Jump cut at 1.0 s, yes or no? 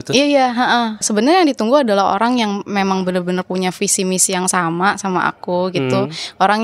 yes